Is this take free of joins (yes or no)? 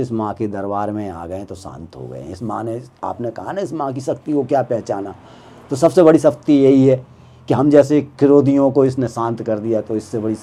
yes